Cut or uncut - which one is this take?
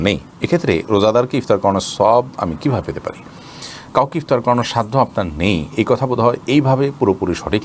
uncut